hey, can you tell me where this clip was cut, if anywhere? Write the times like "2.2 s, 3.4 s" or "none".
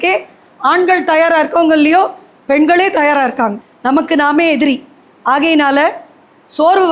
none